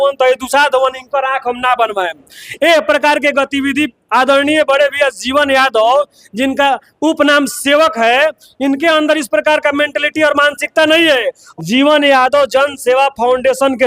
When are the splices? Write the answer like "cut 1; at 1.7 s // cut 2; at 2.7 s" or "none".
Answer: cut 1; at 11.4 s